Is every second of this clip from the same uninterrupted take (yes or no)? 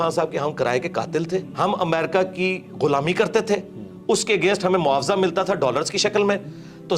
no